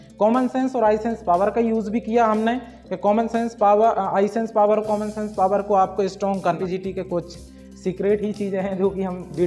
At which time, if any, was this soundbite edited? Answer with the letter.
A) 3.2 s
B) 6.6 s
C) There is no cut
B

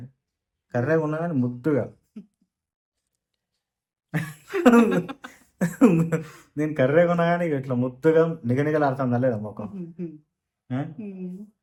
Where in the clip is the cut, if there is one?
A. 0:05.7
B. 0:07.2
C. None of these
C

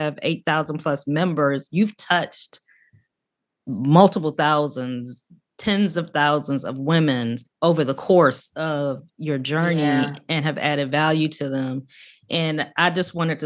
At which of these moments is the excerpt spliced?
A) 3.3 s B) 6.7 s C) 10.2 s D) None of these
D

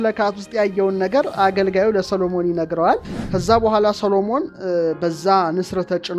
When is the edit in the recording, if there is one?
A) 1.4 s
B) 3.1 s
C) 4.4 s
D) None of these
B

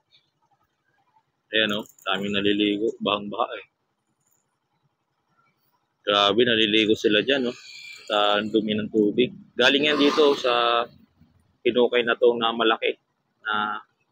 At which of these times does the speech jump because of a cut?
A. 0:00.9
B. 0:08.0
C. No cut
A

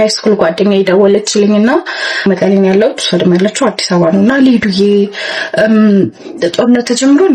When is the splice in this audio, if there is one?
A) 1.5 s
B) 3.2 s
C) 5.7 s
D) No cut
D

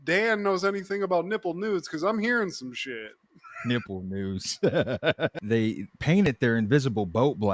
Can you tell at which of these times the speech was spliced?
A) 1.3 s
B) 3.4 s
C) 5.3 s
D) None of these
C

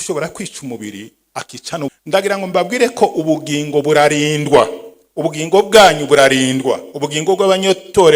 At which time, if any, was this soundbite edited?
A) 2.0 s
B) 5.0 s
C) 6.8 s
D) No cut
A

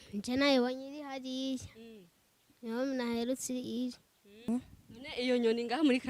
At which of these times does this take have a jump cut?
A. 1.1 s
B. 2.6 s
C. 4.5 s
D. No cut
C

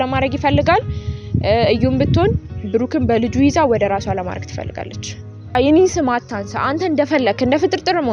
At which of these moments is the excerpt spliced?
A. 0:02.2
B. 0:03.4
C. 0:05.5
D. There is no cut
C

